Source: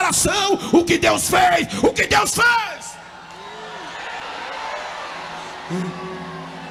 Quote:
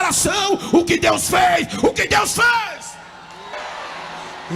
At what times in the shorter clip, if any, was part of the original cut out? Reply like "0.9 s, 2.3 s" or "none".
3.5 s